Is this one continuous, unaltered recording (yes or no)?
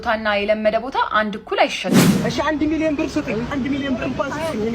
no